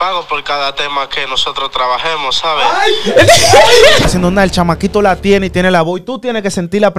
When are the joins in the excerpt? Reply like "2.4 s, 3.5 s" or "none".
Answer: 4.1 s